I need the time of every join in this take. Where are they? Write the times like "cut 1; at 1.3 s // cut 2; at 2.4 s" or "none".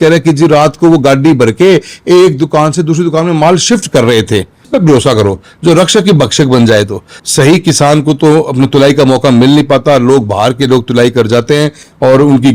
cut 1; at 4.7 s // cut 2; at 7.1 s